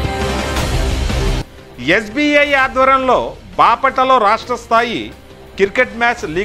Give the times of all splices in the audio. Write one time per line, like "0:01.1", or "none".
0:01.1

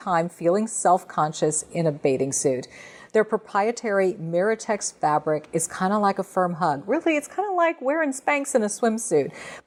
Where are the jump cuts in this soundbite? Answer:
none

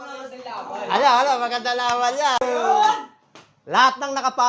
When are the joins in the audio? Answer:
0:02.4

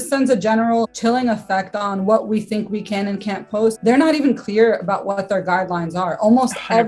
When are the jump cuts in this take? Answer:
0:00.9
0:03.8

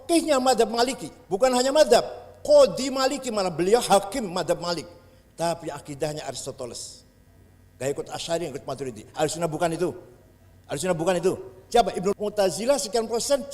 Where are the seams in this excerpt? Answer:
0:12.1

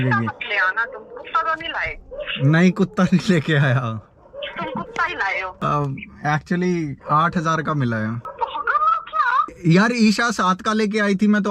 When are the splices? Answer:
0:05.5
0:08.3
0:09.6

